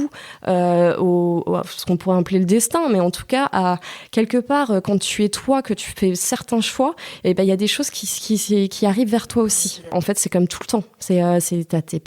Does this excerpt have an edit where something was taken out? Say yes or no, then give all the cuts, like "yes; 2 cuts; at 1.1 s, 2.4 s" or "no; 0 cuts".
yes; 1 cut; at 9.9 s